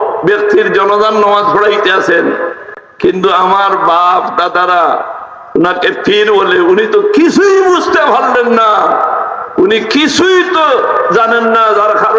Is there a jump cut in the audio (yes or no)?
no